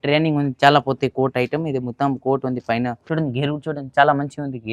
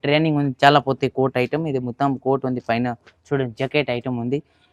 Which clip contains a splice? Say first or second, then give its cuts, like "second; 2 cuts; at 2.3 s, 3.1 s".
first; 1 cut; at 3.0 s